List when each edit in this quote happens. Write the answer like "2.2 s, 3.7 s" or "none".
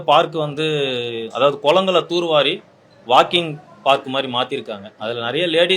none